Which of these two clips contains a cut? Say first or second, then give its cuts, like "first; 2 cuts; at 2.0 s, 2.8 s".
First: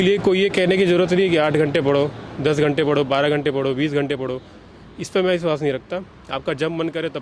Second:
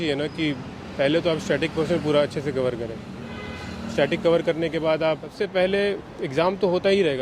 second; 1 cut; at 5.3 s